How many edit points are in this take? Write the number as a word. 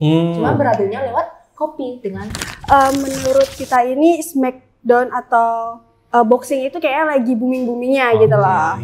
one